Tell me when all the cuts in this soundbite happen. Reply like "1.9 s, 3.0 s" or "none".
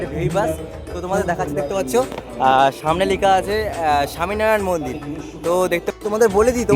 5.9 s

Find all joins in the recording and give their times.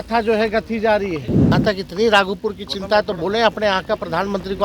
1.5 s

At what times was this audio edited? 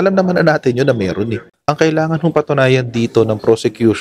1.5 s

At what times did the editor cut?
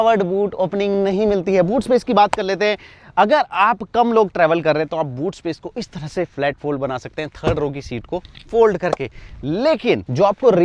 none

